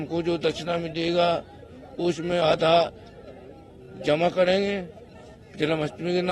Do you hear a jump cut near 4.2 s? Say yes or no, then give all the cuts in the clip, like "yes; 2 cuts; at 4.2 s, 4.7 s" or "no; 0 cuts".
no; 0 cuts